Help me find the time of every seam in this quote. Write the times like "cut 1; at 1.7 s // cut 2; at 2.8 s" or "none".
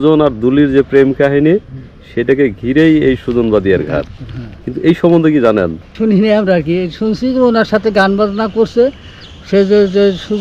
cut 1; at 5.9 s